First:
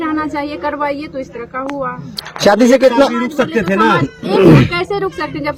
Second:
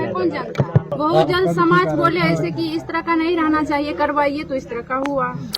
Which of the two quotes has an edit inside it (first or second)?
second